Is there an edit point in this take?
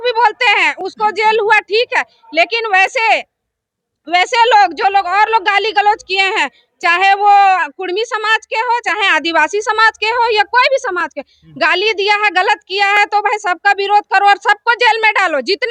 no; 0 cuts

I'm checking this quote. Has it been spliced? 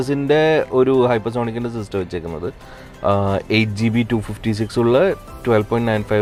no; 0 cuts

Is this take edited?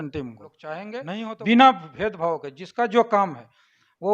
yes; 1 cut; at 0.9 s

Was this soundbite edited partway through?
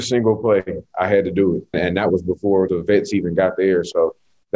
yes; 2 cuts; at 1.7 s, 2.7 s

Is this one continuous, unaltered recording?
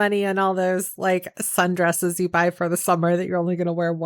yes; 0 cuts

